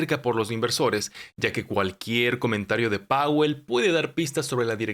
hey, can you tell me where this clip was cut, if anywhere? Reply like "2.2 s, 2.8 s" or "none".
none